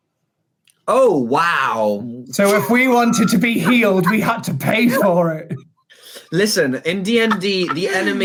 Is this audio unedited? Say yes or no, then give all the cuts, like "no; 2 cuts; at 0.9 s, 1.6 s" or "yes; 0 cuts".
yes; 0 cuts